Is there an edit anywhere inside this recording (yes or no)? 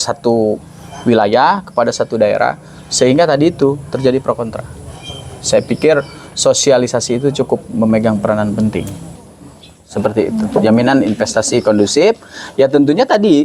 yes